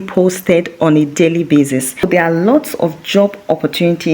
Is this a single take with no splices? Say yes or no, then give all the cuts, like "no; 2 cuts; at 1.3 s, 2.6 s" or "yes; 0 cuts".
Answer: no; 1 cut; at 2.0 s